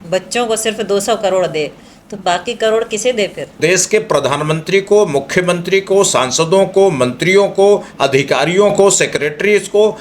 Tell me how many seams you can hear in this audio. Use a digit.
1